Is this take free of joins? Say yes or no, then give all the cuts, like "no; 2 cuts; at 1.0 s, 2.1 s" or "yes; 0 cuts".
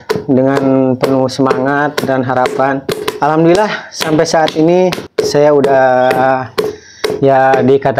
no; 2 cuts; at 3.1 s, 5.1 s